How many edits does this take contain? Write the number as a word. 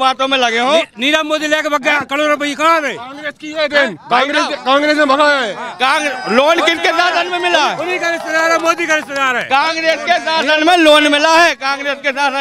zero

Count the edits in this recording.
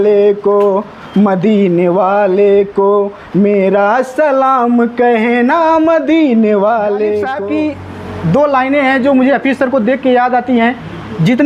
one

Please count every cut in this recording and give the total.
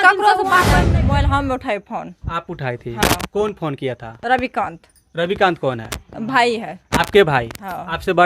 one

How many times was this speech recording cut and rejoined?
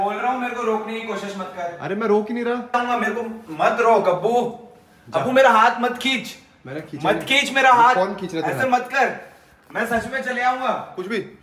one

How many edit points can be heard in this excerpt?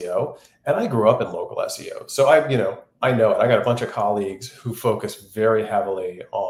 zero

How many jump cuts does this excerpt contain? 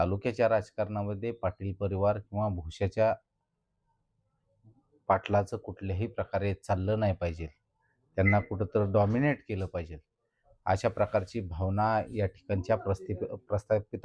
zero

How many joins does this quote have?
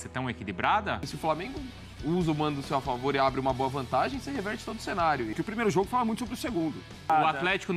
three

